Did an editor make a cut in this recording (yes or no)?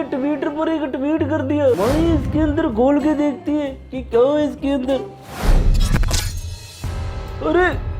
yes